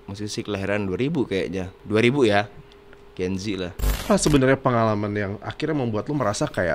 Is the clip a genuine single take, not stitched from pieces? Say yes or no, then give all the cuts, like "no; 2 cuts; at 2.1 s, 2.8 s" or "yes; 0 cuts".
no; 2 cuts; at 1.7 s, 4.0 s